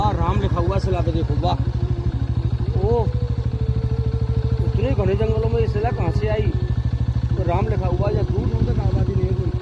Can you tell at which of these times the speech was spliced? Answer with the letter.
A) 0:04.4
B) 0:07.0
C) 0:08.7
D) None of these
D